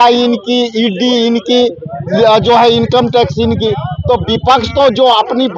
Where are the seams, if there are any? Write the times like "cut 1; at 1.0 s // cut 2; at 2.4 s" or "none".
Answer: none